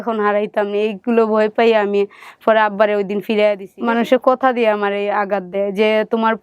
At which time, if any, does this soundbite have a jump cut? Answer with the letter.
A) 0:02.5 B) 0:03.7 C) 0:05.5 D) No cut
B